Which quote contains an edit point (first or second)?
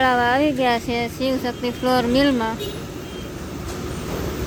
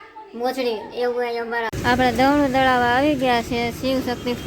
second